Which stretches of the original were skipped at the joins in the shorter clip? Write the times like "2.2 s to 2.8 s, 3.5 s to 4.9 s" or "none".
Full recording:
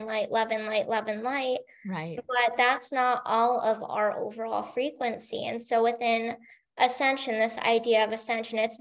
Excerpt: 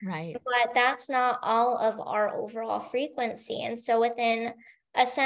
none